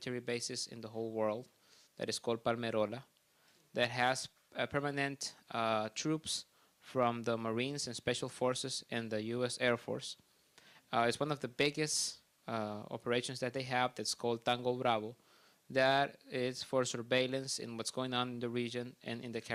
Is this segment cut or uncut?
uncut